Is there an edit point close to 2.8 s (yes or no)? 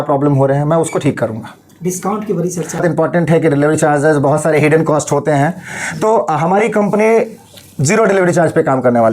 yes